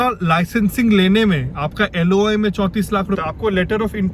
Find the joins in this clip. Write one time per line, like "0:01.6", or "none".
0:03.2